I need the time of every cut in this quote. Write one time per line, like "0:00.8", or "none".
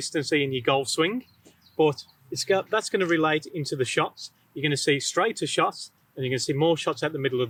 none